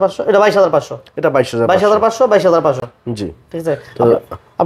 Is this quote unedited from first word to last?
yes; 0 cuts

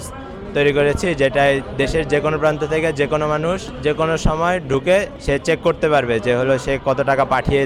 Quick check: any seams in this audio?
yes; 2 cuts; at 3.7 s, 5.2 s

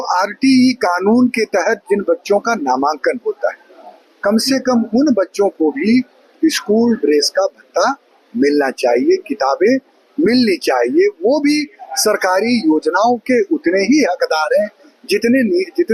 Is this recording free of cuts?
yes; 0 cuts

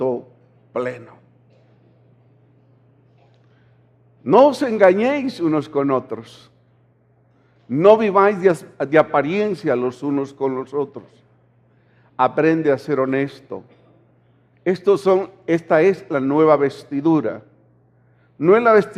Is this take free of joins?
no; 1 cut; at 8.7 s

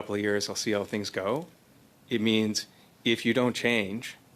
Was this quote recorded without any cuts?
yes; 0 cuts

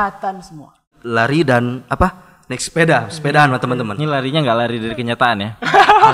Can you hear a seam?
yes; 1 cut; at 1.0 s

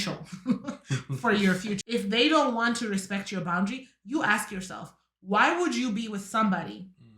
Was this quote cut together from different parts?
yes; 1 cut; at 1.8 s

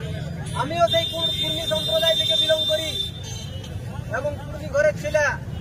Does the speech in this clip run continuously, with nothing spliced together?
yes; 0 cuts

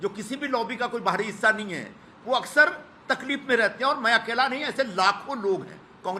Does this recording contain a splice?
no; 0 cuts

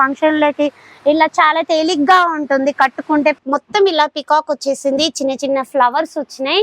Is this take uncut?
no; 1 cut; at 3.4 s

